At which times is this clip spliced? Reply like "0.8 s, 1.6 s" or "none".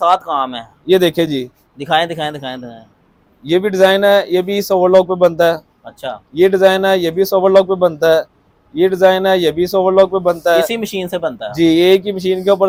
none